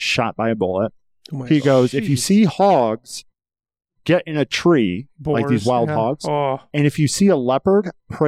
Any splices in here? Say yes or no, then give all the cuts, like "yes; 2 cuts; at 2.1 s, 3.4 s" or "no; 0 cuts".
yes; 1 cut; at 6.7 s